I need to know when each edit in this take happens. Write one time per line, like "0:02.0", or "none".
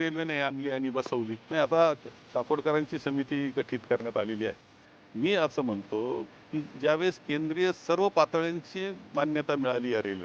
0:01.4